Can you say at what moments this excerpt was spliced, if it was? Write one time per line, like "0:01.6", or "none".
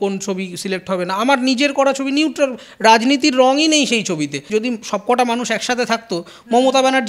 0:04.4